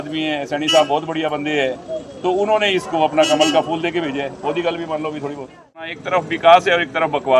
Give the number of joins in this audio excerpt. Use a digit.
1